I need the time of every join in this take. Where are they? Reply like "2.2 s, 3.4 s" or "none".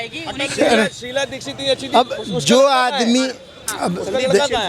none